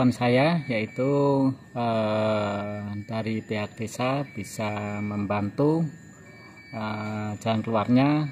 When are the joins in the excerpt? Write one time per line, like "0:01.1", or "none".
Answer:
none